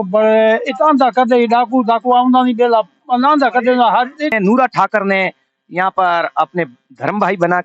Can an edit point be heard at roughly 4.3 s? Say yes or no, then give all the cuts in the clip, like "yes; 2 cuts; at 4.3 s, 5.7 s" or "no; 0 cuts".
yes; 1 cut; at 4.3 s